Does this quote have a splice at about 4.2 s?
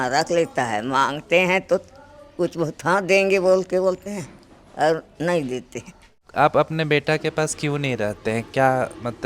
no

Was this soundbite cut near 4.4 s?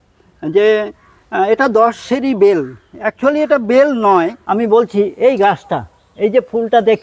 yes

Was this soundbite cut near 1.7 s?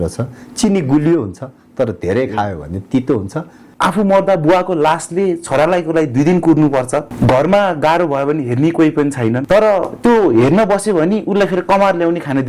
no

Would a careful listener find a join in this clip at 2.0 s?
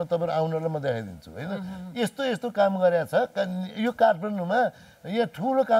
no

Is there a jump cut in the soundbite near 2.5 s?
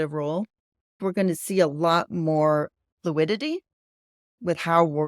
no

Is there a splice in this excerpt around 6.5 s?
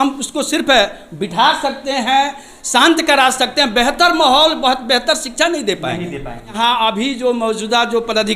yes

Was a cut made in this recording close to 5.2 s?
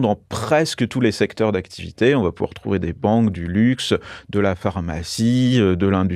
no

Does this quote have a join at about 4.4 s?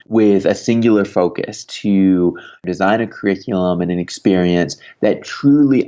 no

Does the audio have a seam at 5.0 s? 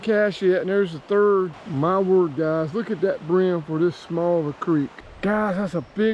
yes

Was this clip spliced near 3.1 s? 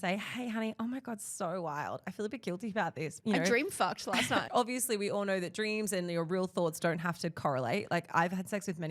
yes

